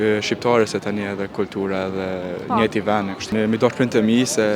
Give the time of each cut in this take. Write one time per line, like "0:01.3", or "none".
0:03.3

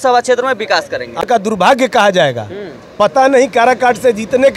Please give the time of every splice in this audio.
0:01.2

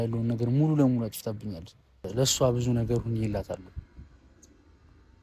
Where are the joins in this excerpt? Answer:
0:02.0

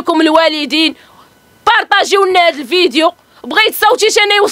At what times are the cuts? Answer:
none

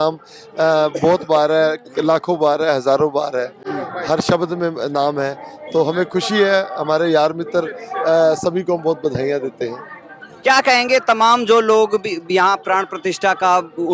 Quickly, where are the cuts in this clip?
none

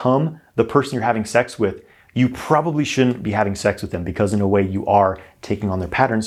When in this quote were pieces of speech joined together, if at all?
none

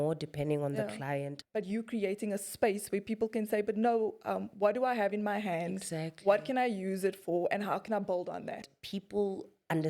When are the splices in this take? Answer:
0:01.4
0:08.7

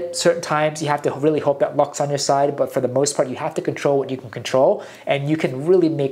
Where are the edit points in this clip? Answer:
none

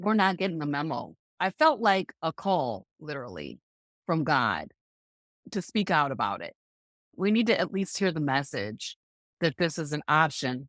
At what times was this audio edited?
0:01.4
0:05.4
0:07.1

